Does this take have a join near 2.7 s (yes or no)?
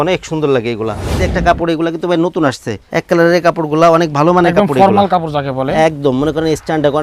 yes